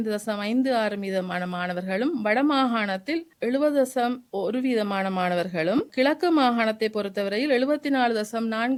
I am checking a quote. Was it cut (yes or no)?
no